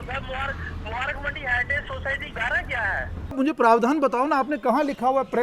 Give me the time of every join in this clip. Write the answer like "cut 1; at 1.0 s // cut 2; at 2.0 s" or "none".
cut 1; at 3.4 s